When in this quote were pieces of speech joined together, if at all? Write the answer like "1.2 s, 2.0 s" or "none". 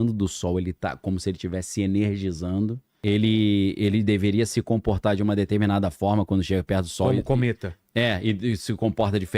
2.9 s